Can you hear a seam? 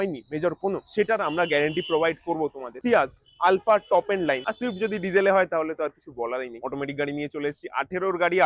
yes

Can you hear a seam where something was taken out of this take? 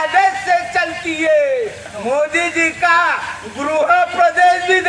yes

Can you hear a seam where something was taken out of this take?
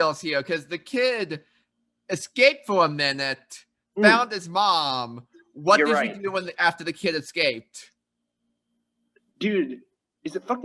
no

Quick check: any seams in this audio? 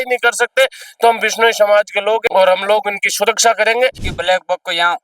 yes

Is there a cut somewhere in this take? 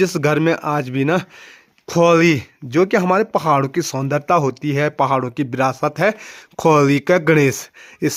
no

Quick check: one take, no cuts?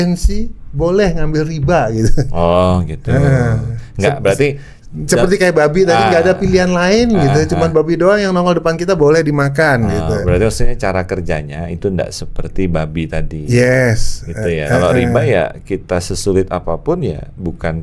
yes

